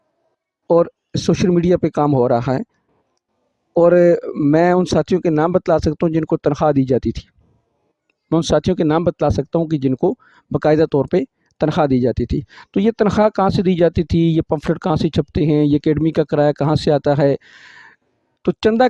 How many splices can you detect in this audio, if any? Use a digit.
0